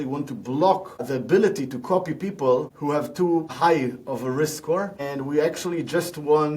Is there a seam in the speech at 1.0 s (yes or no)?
yes